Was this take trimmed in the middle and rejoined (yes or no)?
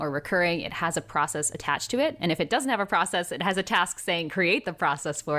no